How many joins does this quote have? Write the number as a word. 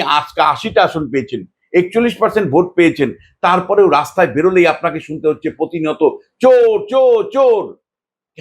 zero